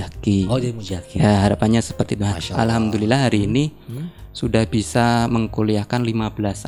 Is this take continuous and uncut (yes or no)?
yes